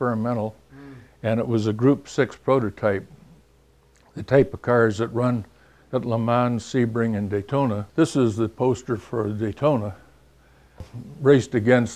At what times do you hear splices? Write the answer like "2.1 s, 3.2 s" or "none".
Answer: 7.8 s